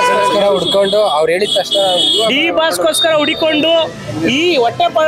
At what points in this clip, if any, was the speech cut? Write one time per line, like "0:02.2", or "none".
none